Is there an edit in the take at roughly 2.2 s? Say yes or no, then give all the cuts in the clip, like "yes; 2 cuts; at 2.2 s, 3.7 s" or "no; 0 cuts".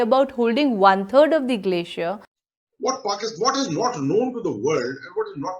yes; 1 cut; at 2.2 s